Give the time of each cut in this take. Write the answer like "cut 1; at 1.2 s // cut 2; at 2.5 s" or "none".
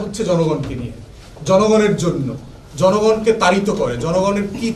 none